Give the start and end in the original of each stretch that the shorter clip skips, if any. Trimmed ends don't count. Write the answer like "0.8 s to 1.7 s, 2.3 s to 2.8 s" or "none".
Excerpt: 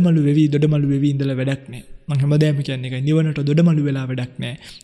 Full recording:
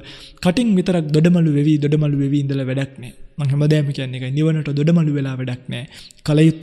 none